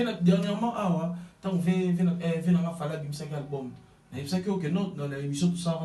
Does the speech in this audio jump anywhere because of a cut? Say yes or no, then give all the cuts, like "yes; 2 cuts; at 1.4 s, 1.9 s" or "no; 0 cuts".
no; 0 cuts